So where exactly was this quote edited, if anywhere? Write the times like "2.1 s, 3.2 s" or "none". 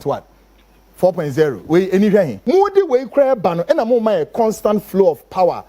2.4 s